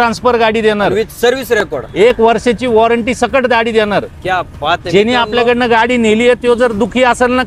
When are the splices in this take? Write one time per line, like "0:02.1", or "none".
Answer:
none